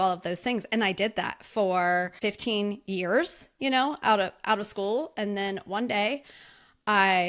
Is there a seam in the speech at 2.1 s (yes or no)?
yes